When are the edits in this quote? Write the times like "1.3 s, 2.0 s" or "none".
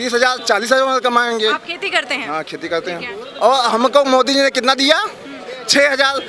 none